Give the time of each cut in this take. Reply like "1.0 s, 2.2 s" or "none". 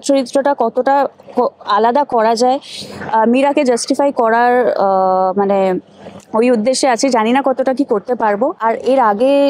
8.6 s